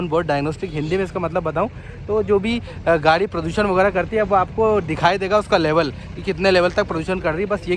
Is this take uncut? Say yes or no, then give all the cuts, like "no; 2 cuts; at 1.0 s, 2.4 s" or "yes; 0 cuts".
yes; 0 cuts